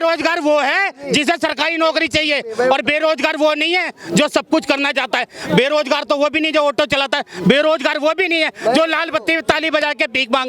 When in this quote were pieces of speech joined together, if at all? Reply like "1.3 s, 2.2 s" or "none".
none